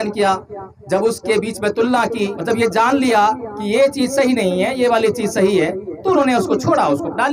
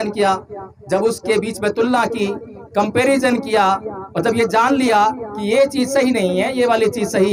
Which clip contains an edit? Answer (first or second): first